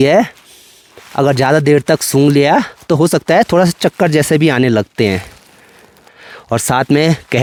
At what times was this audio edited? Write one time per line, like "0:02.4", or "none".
none